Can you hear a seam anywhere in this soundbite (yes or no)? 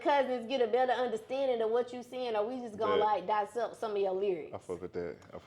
no